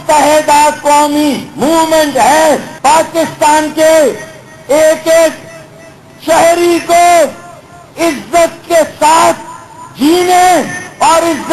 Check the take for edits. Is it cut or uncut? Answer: cut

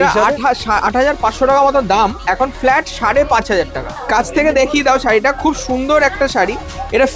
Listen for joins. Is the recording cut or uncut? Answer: cut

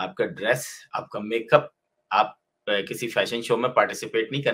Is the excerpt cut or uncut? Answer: uncut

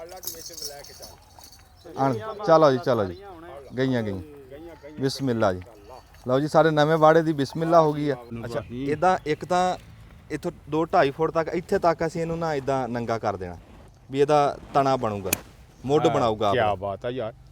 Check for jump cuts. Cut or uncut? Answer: cut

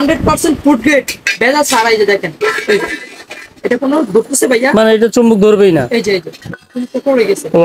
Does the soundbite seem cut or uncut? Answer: uncut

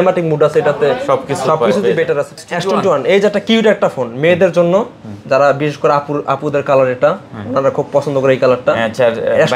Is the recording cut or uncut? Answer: cut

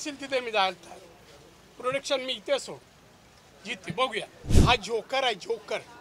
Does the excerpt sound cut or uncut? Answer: cut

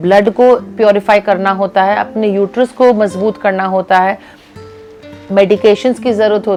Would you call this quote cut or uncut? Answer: uncut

